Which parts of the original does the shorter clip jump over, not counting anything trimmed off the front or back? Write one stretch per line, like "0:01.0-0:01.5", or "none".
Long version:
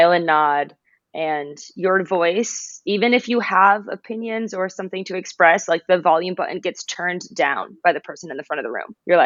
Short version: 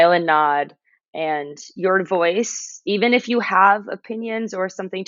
none